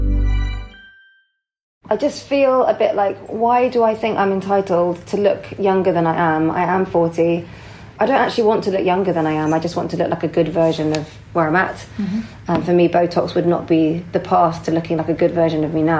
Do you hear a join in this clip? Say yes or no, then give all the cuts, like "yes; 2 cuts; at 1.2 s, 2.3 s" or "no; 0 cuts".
yes; 2 cuts; at 1.6 s, 7.9 s